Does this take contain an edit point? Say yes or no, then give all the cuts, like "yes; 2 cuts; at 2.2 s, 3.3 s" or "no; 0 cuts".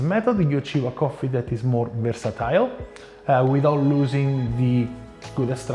no; 0 cuts